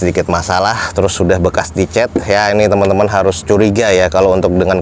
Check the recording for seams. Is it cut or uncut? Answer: uncut